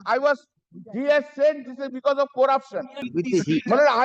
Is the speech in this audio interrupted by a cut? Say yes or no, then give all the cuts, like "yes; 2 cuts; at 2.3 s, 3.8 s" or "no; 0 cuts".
yes; 1 cut; at 3.0 s